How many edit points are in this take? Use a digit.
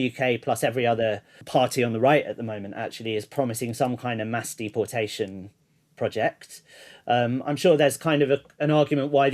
1